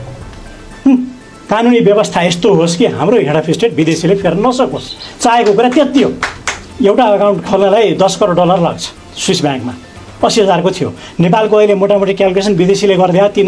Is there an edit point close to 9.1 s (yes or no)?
no